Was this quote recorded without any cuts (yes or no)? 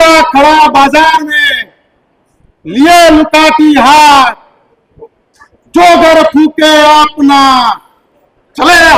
yes